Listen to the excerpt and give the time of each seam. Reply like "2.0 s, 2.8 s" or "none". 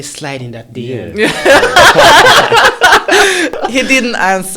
3.6 s